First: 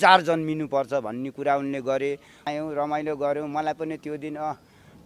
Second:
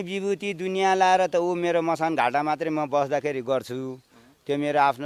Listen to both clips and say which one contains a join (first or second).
first